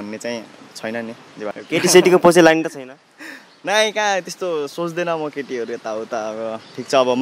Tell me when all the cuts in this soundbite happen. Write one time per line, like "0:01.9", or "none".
0:01.5